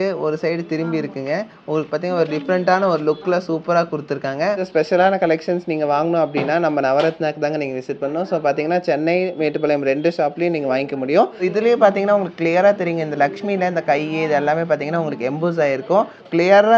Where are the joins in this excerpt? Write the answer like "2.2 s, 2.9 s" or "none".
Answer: 4.6 s, 11.4 s